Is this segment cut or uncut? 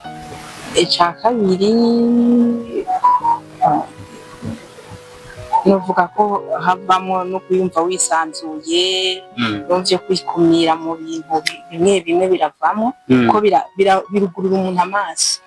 uncut